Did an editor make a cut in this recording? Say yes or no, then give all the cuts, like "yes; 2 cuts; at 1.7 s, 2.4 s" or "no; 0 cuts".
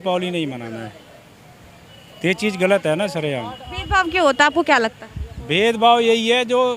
no; 0 cuts